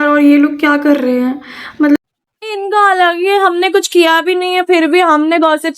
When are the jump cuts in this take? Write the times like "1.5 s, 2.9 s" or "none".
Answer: 2.0 s